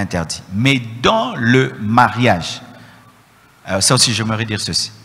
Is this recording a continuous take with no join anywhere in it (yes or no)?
yes